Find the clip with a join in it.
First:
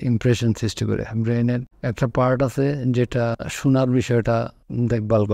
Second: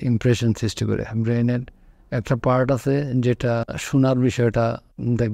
first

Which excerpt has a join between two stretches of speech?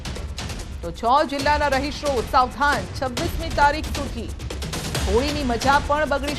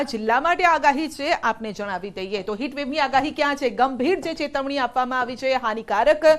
first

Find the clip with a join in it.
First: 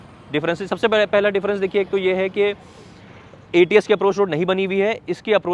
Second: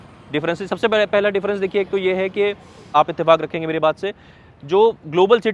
second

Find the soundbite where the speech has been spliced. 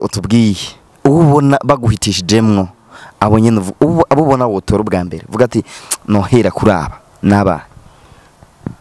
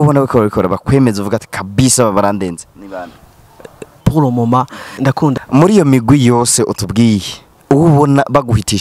second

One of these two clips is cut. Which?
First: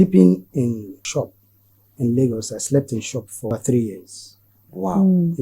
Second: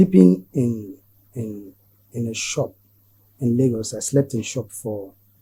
first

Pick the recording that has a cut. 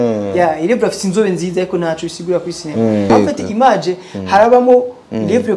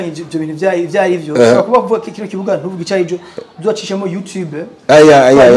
first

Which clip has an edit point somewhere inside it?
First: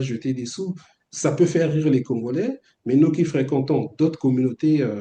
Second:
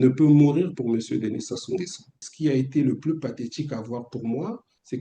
second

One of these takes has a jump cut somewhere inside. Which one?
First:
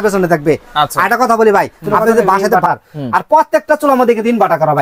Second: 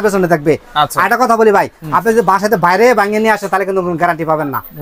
first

